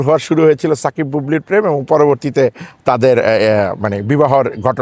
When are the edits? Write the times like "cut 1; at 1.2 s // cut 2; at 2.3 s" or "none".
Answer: none